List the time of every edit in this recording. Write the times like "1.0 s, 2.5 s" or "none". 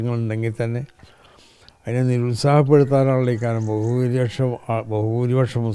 none